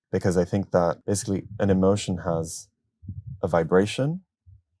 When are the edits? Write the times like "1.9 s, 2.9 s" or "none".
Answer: 1.0 s